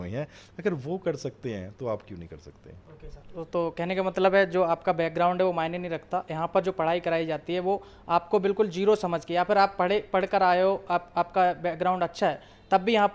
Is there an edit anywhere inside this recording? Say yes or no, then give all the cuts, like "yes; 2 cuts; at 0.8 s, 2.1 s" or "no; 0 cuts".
no; 0 cuts